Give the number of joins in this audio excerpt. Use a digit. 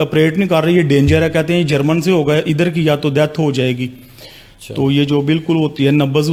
0